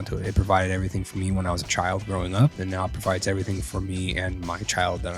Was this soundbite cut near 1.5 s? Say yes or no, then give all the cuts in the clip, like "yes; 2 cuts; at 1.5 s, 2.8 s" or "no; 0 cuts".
no; 0 cuts